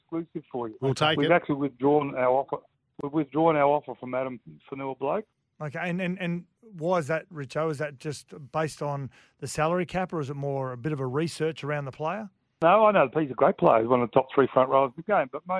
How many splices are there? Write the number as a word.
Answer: two